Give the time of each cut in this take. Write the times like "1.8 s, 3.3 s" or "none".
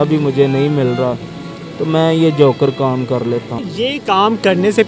none